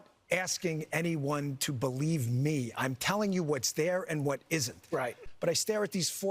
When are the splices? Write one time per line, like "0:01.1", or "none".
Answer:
0:05.3